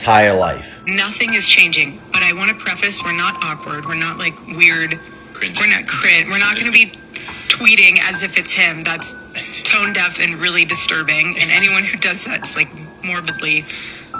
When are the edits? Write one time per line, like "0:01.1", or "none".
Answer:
none